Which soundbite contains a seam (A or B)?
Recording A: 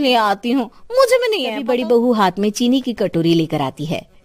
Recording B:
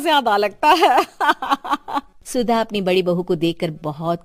A